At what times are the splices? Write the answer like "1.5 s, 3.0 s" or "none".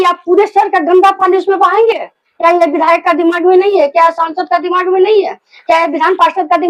none